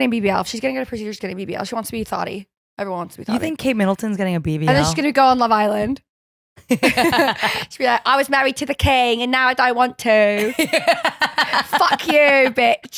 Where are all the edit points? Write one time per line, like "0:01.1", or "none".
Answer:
none